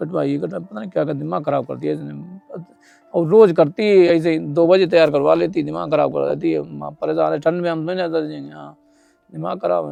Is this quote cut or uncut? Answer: uncut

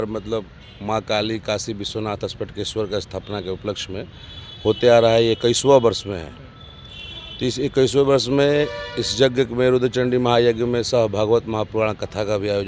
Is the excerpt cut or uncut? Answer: uncut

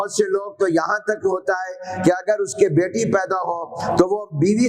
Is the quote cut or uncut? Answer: uncut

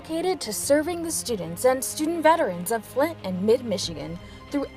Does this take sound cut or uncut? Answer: uncut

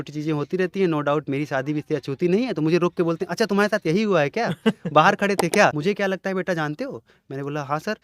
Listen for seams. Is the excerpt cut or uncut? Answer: cut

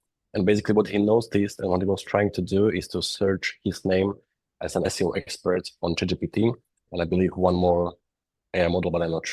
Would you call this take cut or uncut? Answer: cut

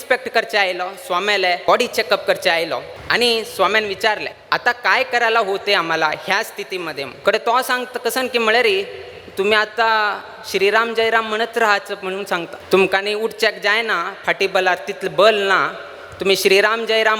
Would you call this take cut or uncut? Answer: cut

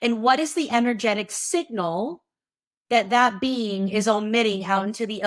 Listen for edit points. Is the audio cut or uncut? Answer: uncut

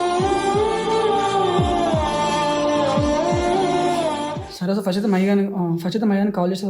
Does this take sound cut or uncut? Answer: uncut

